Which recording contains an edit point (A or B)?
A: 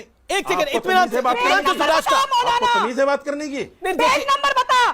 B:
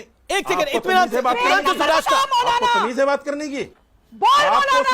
B